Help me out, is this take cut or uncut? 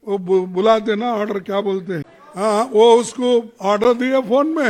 cut